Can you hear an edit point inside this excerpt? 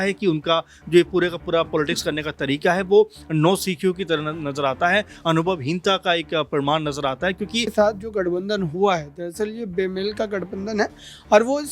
yes; 1 cut; at 7.7 s

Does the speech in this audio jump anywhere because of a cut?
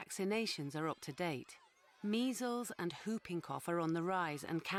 no; 0 cuts

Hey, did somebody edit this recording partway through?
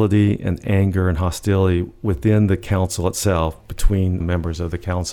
yes; 1 cut; at 4.2 s

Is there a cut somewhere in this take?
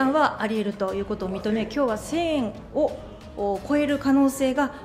no; 0 cuts

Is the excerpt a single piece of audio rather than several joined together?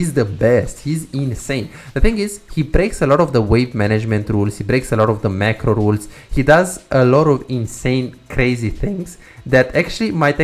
yes; 0 cuts

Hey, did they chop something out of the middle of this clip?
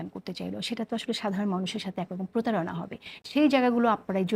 no; 0 cuts

